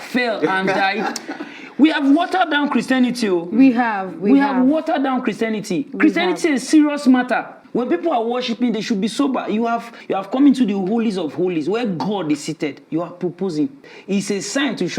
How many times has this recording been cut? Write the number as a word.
three